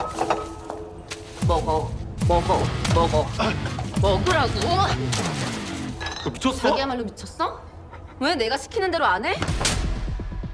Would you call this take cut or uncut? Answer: cut